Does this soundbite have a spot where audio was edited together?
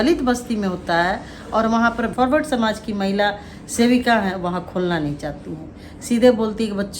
yes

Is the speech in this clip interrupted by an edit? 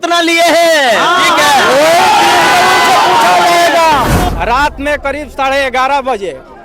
yes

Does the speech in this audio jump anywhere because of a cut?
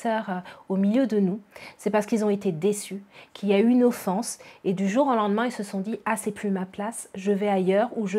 no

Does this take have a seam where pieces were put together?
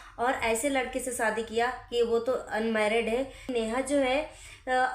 yes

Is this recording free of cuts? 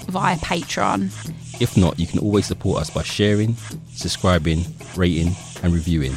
yes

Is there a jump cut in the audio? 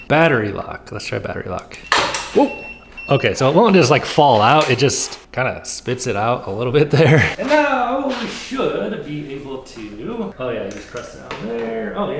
no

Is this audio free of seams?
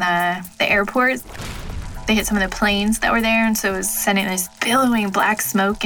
yes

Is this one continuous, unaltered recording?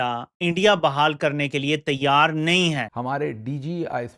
no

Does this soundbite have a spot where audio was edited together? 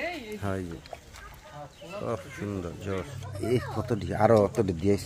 yes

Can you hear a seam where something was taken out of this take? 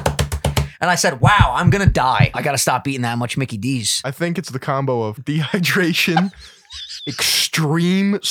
yes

